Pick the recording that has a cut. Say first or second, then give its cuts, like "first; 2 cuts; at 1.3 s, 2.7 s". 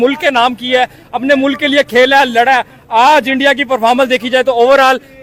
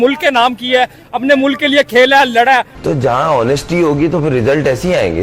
second; 1 cut; at 2.7 s